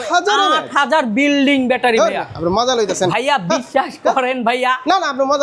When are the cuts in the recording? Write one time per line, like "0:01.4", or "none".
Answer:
none